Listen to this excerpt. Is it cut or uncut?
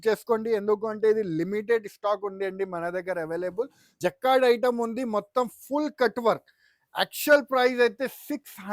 cut